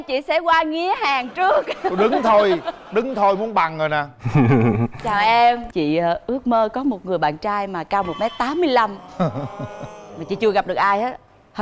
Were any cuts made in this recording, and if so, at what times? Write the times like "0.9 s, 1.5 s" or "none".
5.7 s